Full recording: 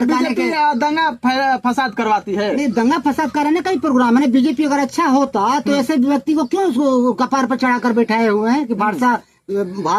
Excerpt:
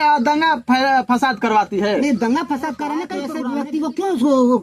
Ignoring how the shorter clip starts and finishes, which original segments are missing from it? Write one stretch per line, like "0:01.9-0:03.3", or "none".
0:03.8-0:05.8